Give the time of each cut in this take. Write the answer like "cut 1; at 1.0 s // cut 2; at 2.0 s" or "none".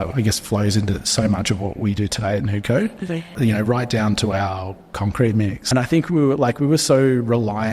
cut 1; at 3.4 s // cut 2; at 5.6 s

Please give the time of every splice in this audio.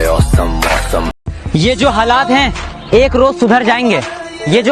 none

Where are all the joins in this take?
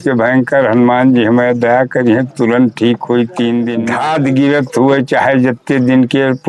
cut 1; at 3.8 s

